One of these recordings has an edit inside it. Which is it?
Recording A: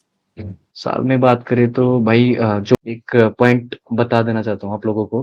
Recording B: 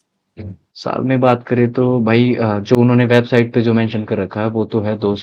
A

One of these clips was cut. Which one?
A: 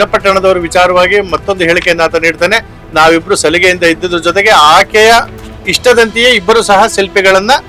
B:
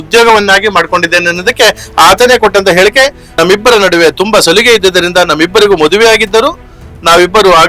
B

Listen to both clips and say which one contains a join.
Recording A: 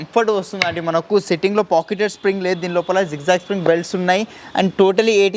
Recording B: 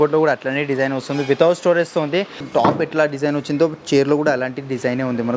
B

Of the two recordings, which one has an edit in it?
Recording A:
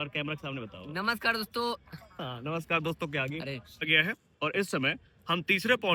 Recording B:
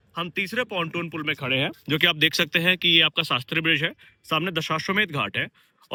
A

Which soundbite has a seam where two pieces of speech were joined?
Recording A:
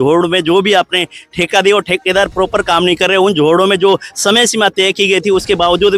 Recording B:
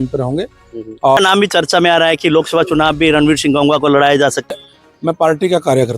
B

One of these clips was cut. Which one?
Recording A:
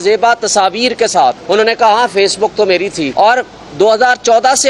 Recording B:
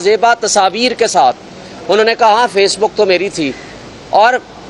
A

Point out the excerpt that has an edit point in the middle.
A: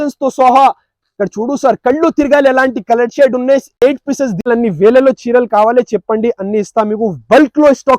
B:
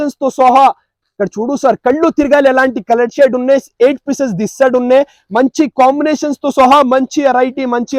A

